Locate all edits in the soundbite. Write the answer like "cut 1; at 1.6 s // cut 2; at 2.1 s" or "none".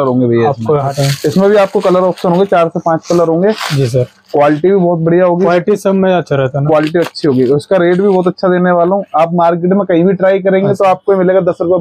cut 1; at 0.9 s